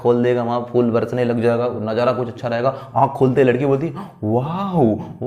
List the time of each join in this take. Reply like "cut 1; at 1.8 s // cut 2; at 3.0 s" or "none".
none